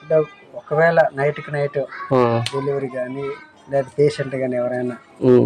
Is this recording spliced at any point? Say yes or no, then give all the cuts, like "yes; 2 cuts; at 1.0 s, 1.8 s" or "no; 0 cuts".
no; 0 cuts